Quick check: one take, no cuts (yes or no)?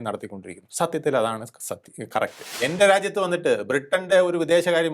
no